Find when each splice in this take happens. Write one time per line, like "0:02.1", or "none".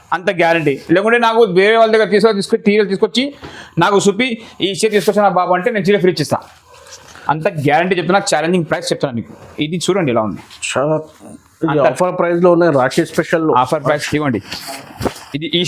0:14.0